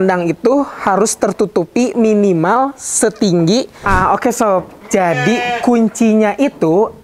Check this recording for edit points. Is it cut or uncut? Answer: cut